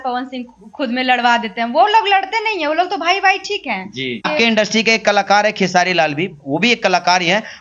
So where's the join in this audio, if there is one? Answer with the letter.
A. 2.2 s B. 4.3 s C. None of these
B